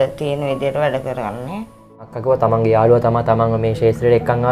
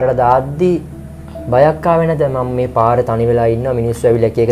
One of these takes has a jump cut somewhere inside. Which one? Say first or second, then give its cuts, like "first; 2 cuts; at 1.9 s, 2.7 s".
first; 1 cut; at 2.1 s